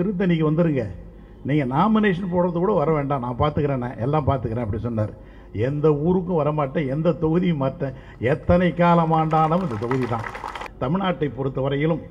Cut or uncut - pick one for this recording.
cut